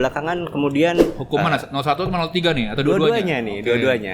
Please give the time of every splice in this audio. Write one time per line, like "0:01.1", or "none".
0:01.2